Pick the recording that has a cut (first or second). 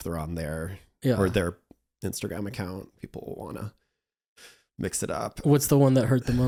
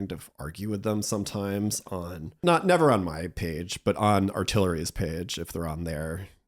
second